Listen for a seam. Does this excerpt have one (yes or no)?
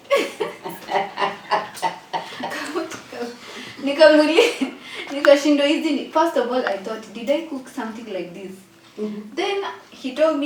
no